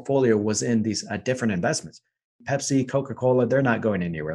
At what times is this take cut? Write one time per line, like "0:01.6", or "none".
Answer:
0:02.4